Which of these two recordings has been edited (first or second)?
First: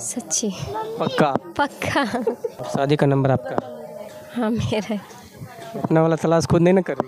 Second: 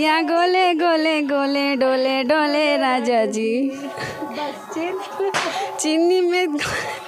first